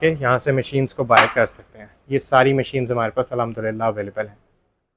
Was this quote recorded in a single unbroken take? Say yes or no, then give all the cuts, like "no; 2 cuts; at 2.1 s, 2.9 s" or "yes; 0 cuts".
yes; 0 cuts